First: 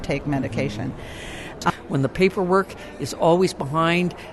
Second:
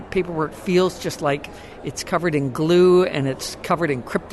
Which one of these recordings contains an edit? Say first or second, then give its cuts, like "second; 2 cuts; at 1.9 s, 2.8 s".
first; 1 cut; at 1.7 s